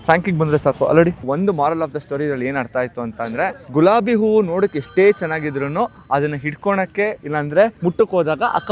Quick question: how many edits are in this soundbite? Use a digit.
1